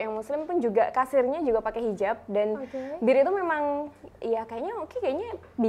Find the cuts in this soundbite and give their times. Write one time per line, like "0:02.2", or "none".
none